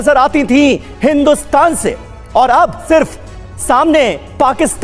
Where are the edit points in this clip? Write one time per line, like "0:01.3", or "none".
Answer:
0:02.8